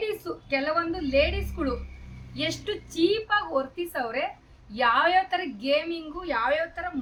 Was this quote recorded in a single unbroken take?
yes; 0 cuts

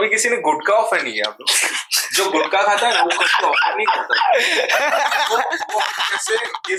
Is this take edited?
no; 0 cuts

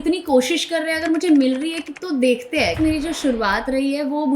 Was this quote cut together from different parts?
yes; 1 cut; at 2.8 s

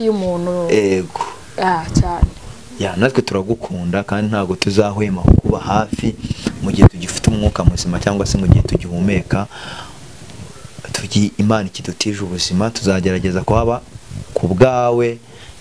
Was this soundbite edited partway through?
no; 0 cuts

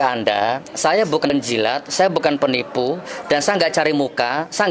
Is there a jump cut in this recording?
yes; 1 cut; at 1.3 s

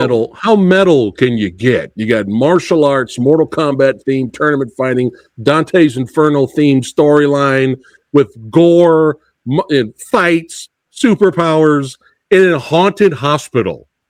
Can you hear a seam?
no; 0 cuts

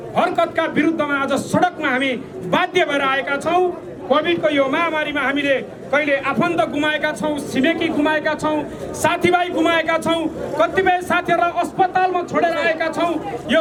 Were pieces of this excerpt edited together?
no; 0 cuts

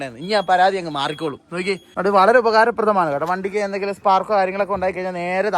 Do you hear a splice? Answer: yes; 1 cut; at 1.8 s

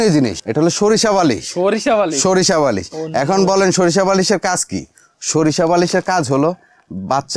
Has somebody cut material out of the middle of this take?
no; 0 cuts

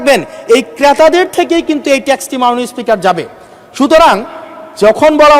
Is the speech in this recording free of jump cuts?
yes; 0 cuts

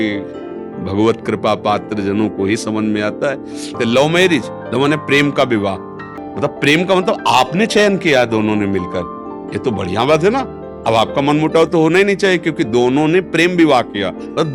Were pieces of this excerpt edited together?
yes; 2 cuts; at 3.8 s, 6.3 s

